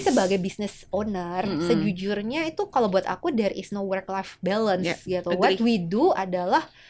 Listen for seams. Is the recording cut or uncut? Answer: uncut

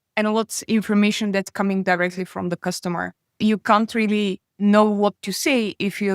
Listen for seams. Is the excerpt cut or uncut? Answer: cut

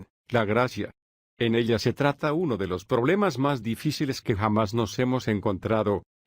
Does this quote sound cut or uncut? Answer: cut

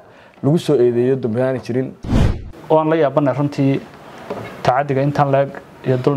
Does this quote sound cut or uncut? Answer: cut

